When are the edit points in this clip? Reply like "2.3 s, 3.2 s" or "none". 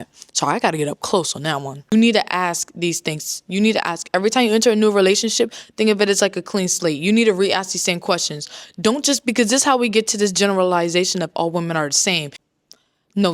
1.8 s, 12.4 s